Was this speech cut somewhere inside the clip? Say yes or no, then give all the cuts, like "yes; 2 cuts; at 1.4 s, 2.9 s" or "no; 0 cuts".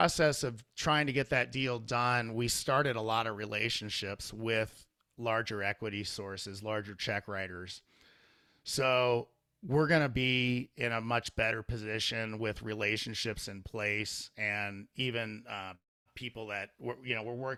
no; 0 cuts